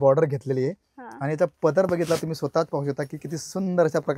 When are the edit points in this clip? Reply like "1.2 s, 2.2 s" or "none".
none